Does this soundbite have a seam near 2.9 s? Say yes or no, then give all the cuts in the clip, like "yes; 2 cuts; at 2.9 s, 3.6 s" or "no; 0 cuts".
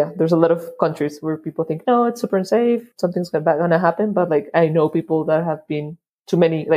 yes; 1 cut; at 2.9 s